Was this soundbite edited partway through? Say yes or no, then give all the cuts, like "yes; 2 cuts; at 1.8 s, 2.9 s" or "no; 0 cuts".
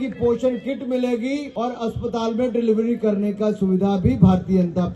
yes; 1 cut; at 1.5 s